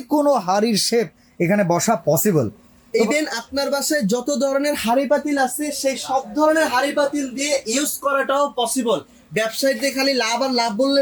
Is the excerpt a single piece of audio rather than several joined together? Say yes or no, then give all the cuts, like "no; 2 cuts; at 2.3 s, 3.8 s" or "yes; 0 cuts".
yes; 0 cuts